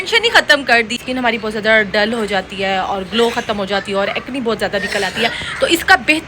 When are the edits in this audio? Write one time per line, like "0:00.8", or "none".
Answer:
0:01.0

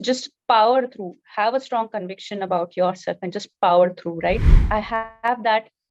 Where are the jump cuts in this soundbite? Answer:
0:04.6

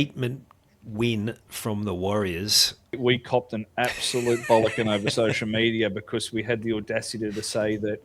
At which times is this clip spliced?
0:03.0

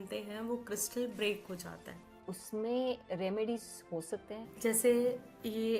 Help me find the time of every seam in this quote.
0:02.3
0:04.5

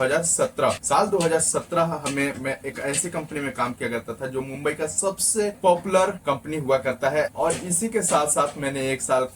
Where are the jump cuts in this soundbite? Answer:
0:00.8
0:05.6
0:06.2
0:07.3

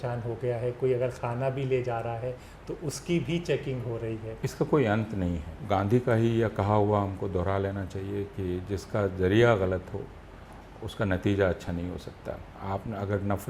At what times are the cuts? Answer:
0:04.3
0:05.5
0:12.5

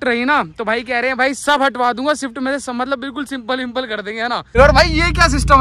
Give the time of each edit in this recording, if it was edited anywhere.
0:04.6

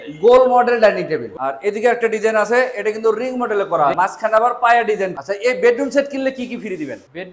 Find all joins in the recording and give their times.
0:01.3
0:03.9
0:05.1

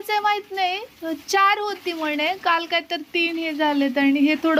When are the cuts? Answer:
none

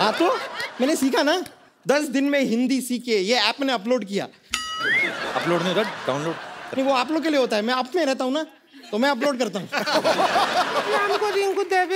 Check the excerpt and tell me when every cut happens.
0:11.0

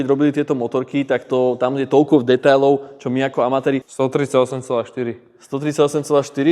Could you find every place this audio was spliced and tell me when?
0:03.9

